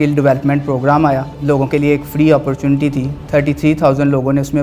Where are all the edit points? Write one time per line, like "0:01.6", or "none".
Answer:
0:01.3